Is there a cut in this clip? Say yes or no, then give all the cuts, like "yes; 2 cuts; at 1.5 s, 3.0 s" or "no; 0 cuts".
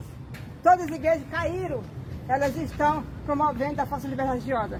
no; 0 cuts